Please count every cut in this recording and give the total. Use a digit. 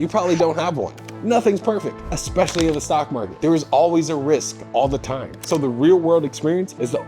1